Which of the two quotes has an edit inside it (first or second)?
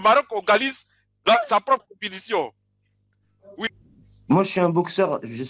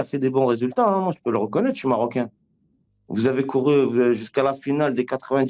first